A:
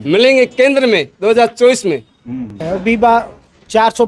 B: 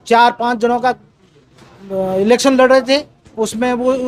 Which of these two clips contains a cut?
A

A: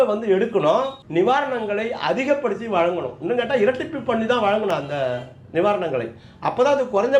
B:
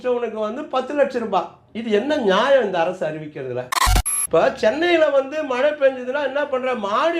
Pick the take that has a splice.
B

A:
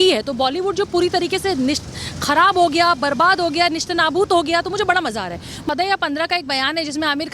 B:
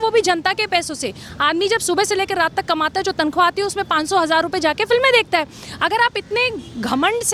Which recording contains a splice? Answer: A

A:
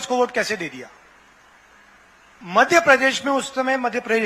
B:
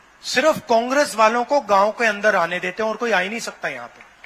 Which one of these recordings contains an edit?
A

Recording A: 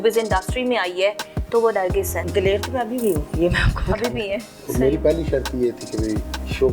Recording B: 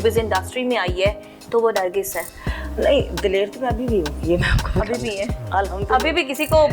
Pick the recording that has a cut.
A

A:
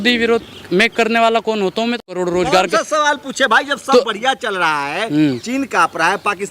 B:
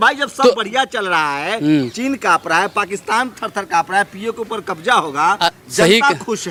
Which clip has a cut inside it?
A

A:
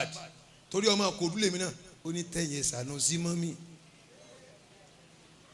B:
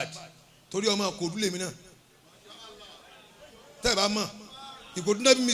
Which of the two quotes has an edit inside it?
A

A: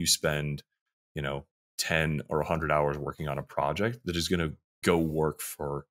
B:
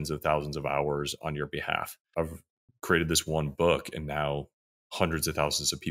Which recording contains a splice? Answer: B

